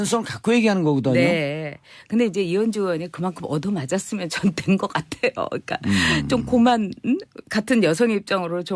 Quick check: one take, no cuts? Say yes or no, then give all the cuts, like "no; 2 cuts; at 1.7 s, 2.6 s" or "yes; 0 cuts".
no; 1 cut; at 7.3 s